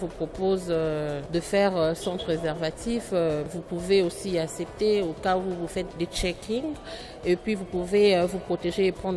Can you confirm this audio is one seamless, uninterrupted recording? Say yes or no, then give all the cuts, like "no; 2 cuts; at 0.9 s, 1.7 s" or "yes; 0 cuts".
no; 3 cuts; at 1.2 s, 3.5 s, 5.9 s